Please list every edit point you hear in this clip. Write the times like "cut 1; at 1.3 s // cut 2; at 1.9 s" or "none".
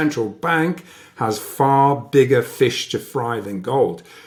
none